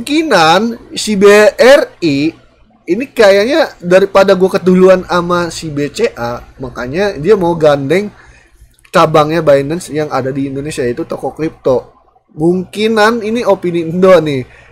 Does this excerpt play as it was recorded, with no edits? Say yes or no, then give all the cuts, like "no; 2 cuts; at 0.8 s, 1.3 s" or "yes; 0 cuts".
yes; 0 cuts